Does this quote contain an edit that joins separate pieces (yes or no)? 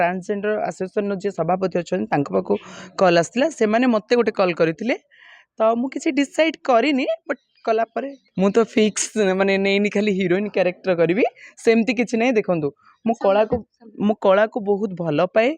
yes